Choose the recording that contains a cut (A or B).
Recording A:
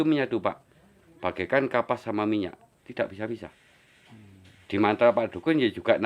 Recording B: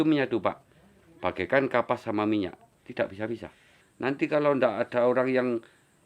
B